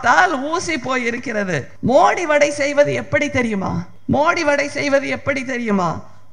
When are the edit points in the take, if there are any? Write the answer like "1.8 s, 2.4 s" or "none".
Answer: 1.7 s, 3.9 s